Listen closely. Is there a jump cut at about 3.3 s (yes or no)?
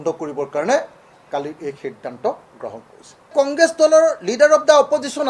yes